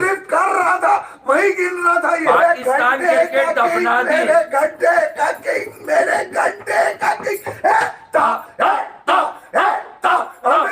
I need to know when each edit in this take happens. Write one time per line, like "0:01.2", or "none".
0:02.3